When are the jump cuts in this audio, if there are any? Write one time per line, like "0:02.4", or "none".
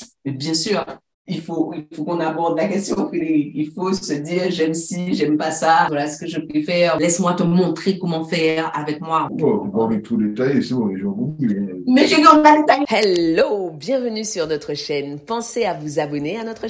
0:05.9
0:07.0
0:09.3
0:12.9

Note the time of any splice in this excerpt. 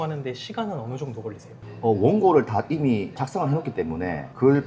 none

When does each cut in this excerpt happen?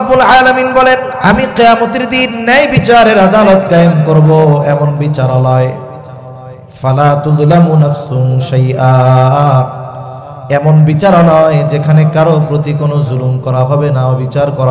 0:01.1

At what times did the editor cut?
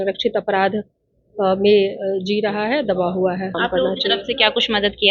0:03.5

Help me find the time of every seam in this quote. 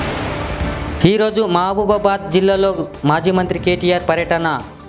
0:00.9

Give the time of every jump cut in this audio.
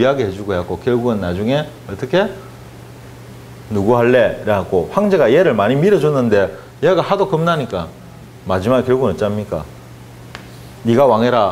0:07.2

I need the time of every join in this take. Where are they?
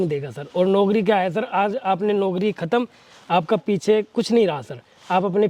none

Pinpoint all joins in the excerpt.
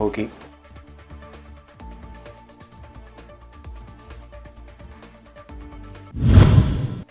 none

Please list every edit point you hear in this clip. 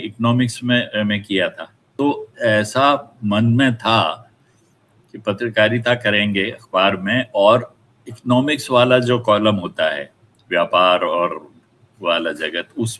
0:01.9

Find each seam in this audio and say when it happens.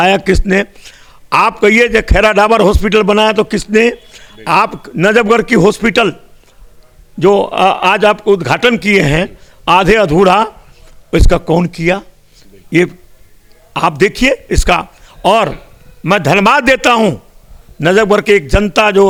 none

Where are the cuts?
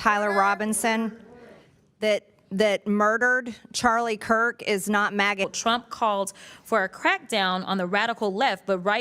0:05.5

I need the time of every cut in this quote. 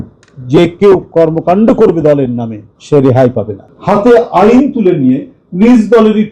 0:03.6

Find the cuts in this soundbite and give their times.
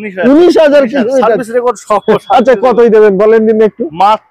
none

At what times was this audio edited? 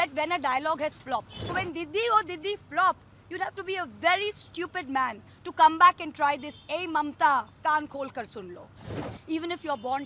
0:01.4
0:09.0

